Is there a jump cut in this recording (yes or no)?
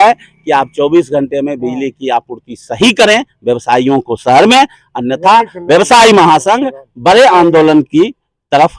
no